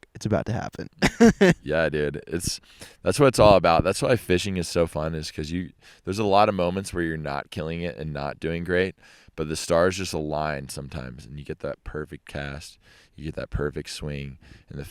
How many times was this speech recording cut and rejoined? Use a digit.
1